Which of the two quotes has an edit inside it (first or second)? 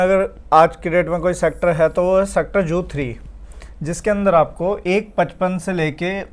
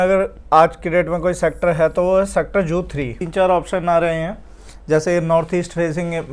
second